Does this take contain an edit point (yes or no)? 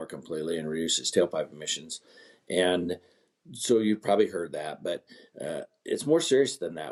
no